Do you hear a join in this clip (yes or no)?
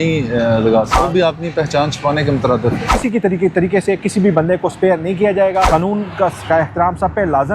yes